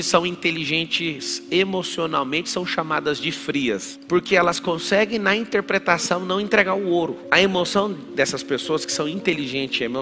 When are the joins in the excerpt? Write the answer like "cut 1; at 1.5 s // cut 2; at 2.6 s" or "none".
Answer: cut 1; at 3.9 s